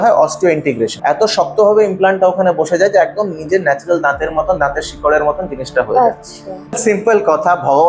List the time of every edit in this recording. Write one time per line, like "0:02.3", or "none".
0:00.9
0:06.8